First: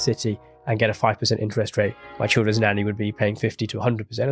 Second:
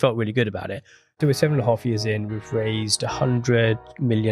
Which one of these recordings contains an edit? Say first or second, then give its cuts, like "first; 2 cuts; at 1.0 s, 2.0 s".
second; 1 cut; at 1.2 s